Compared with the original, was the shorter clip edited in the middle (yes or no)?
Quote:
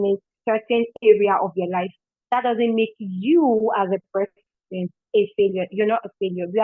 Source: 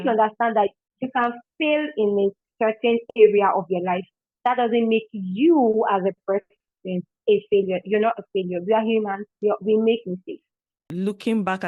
no